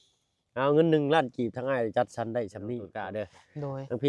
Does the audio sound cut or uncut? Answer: cut